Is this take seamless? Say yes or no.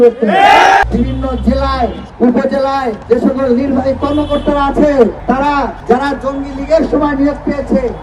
no